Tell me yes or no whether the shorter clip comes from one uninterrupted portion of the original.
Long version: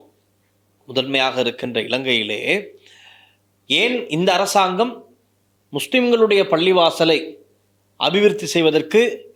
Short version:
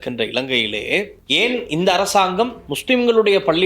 no